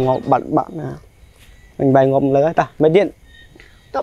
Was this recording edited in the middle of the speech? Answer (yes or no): no